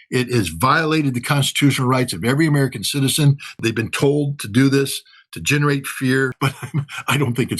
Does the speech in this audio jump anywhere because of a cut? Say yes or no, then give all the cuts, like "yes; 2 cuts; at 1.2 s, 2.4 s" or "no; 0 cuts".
yes; 2 cuts; at 3.6 s, 6.5 s